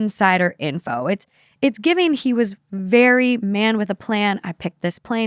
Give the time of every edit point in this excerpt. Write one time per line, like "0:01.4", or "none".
none